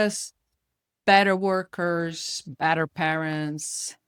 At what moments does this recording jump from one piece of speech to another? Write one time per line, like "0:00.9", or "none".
none